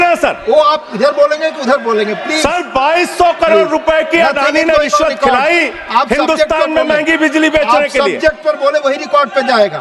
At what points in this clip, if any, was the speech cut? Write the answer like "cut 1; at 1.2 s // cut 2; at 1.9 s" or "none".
none